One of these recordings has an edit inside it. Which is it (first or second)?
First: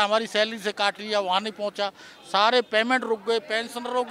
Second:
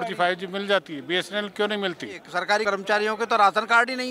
second